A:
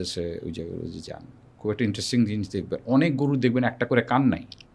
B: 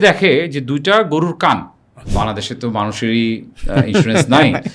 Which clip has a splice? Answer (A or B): B